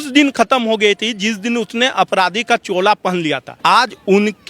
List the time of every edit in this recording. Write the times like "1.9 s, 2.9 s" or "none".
3.5 s